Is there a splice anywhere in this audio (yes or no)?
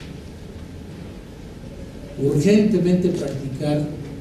no